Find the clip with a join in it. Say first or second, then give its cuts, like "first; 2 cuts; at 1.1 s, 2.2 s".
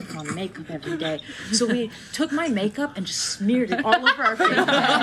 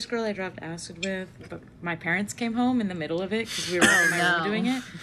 second; 1 cut; at 1.3 s